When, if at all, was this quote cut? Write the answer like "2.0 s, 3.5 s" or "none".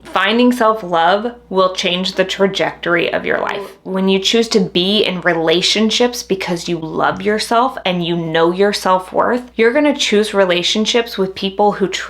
3.7 s

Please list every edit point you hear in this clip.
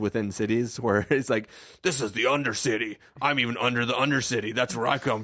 none

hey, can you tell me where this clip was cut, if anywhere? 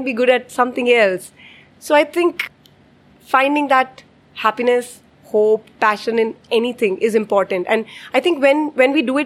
2.5 s

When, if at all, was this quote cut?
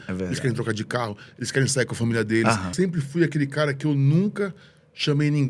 2.7 s

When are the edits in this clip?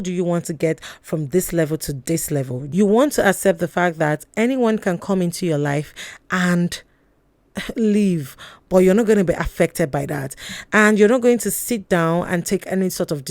2.6 s

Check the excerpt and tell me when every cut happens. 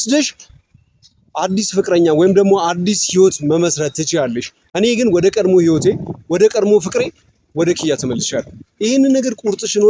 none

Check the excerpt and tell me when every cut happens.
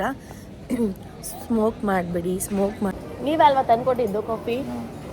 3.0 s

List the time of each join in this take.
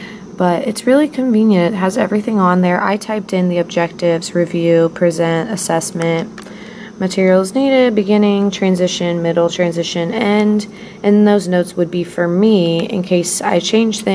none

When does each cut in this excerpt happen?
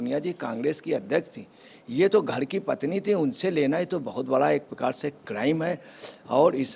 none

